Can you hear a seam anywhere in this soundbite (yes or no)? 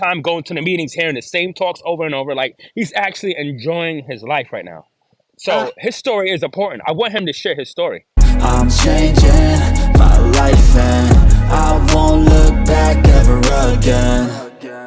yes